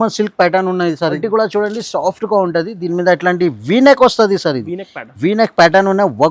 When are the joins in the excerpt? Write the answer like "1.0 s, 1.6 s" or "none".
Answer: 1.2 s